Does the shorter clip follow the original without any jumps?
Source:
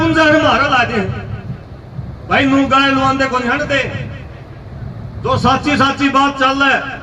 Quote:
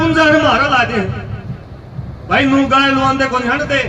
yes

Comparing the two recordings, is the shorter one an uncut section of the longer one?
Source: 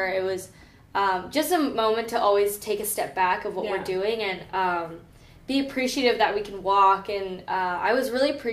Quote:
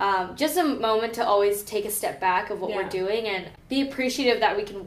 no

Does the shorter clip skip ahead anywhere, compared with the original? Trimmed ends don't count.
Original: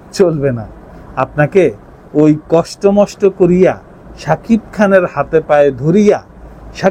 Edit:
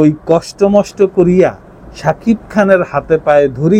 no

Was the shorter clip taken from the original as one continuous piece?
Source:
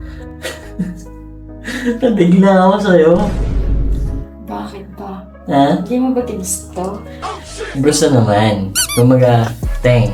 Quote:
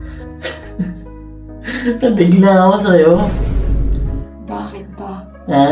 yes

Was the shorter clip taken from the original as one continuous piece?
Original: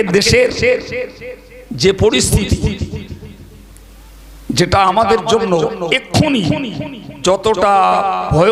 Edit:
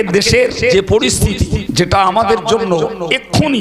no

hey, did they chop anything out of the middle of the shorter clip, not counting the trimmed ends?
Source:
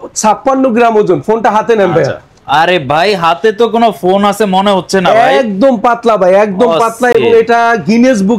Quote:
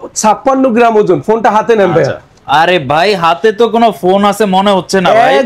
no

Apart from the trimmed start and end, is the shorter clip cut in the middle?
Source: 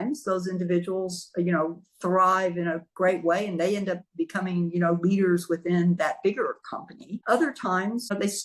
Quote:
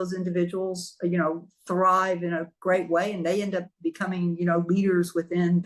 no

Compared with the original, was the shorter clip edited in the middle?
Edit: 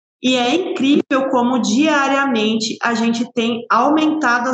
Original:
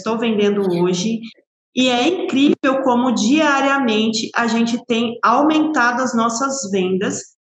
no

